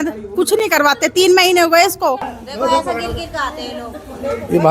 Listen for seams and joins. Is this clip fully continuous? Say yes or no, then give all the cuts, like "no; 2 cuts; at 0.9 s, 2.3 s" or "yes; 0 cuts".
no; 1 cut; at 2.4 s